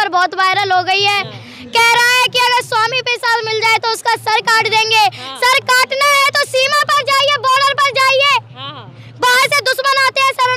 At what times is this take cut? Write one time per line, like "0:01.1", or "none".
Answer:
none